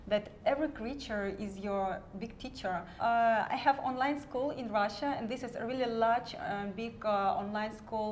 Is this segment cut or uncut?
cut